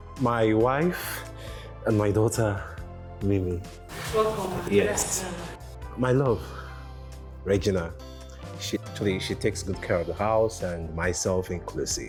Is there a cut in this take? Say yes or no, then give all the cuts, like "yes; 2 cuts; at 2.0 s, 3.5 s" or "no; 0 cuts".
no; 0 cuts